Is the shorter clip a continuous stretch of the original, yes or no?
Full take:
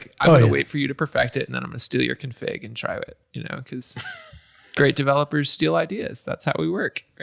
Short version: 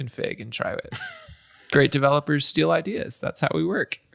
no